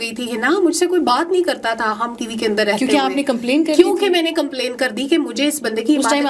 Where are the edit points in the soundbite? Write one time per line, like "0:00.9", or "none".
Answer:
none